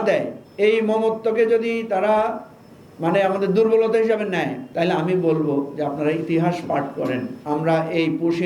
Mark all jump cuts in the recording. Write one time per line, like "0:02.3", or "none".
0:07.3